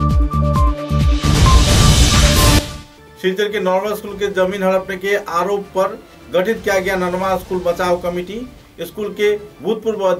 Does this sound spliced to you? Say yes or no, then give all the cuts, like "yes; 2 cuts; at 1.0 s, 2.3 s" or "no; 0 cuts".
yes; 1 cut; at 2.6 s